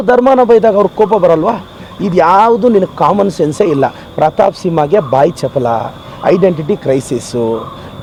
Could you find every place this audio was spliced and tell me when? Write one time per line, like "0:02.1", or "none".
none